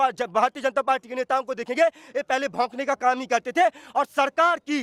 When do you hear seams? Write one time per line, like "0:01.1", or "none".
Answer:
none